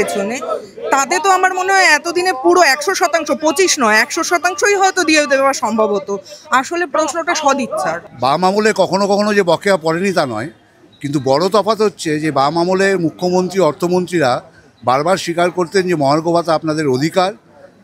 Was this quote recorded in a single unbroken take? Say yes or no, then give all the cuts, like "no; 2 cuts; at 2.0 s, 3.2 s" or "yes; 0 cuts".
no; 1 cut; at 8.0 s